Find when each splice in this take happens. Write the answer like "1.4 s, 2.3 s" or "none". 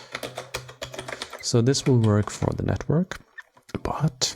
1.3 s